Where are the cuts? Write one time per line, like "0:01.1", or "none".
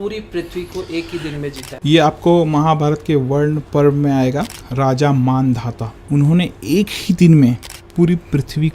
0:01.6
0:03.6
0:04.6
0:06.0
0:07.8

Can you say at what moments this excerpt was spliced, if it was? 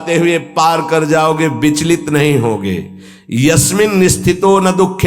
none

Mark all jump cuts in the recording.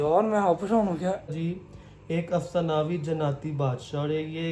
0:01.3

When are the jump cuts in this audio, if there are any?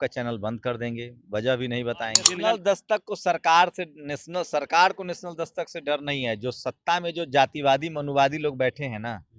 0:02.3

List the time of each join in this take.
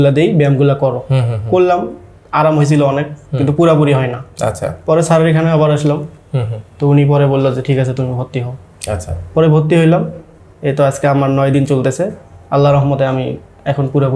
none

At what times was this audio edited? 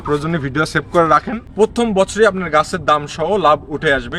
0:01.4

